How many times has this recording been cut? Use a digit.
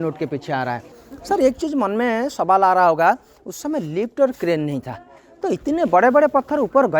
1